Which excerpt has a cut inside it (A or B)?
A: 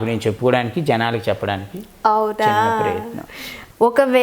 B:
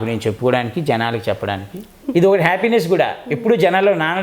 B